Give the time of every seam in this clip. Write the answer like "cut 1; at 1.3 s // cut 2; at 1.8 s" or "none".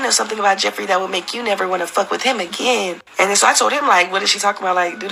none